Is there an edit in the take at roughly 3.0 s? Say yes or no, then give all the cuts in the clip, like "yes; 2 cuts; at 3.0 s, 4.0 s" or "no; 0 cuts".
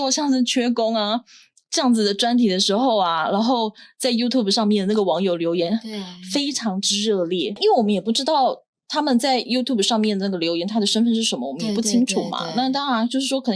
no; 0 cuts